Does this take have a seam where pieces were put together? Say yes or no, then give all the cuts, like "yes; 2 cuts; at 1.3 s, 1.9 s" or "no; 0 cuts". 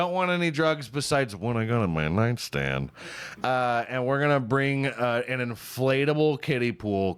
no; 0 cuts